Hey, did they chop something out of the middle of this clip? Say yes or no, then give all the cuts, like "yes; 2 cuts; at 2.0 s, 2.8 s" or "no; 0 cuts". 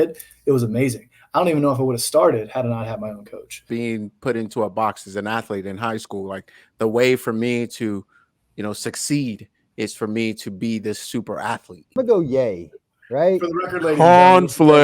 yes; 2 cuts; at 3.6 s, 11.9 s